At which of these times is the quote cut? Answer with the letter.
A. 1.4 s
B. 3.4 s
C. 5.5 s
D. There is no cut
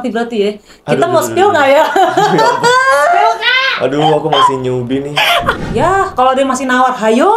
C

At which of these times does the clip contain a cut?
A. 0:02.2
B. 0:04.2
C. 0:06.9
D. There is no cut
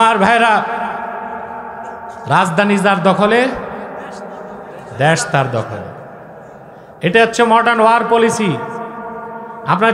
A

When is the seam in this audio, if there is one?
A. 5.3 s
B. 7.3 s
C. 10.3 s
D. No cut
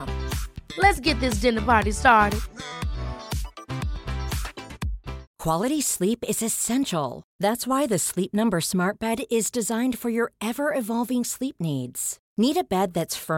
A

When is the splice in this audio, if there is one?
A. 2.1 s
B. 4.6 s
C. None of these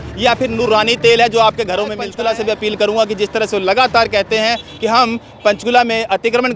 A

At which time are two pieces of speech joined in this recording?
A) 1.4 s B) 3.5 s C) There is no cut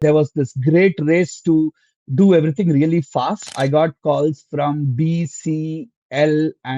B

